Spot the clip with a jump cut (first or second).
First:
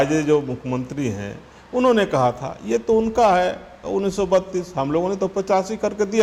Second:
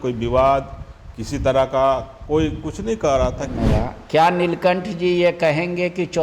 second